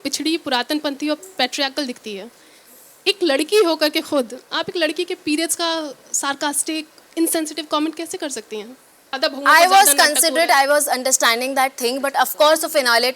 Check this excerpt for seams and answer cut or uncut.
cut